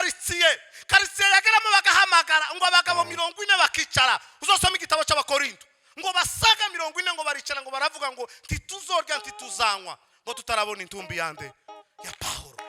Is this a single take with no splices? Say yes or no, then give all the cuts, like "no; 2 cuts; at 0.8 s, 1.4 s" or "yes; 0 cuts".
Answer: yes; 0 cuts